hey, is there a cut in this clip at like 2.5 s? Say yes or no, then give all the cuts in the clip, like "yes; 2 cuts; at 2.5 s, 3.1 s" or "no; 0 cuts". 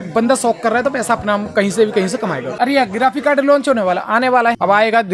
yes; 1 cut; at 2.5 s